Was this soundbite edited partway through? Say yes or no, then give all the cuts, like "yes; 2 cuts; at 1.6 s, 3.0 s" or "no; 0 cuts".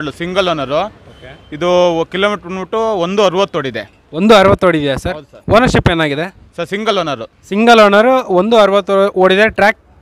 no; 0 cuts